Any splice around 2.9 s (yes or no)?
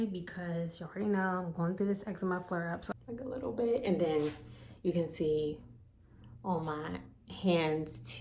yes